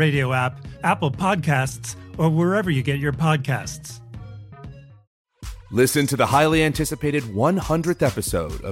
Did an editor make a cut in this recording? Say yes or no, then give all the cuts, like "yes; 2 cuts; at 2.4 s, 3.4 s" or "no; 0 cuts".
yes; 1 cut; at 5.0 s